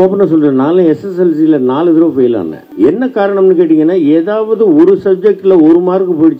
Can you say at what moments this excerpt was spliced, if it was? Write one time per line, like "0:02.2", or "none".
0:02.6